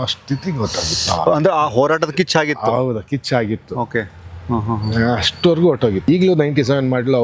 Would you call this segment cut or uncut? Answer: cut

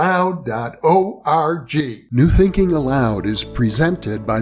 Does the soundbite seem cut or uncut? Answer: cut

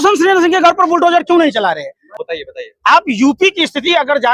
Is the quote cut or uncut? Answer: cut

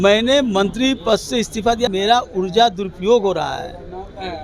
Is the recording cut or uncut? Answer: cut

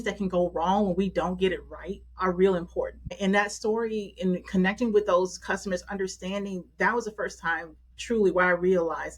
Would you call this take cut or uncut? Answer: cut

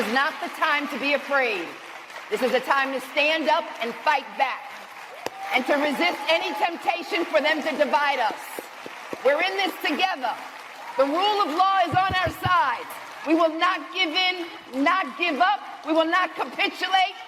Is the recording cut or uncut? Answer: uncut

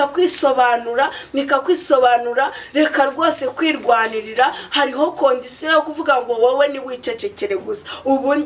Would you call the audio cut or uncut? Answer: uncut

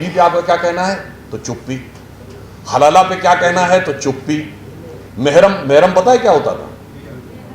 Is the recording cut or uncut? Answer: uncut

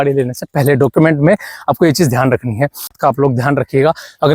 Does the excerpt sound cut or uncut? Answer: cut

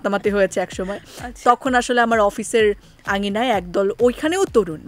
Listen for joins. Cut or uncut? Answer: uncut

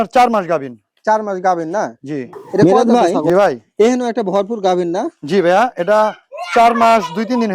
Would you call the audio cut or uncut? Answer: cut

